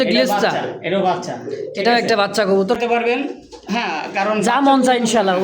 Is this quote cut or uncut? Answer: cut